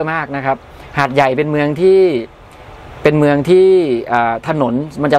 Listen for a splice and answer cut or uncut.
uncut